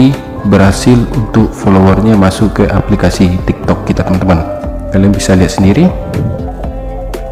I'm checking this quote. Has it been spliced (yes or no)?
no